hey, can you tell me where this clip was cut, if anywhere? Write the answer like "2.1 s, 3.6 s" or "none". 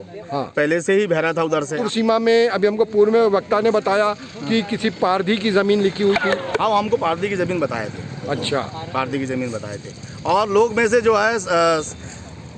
1.8 s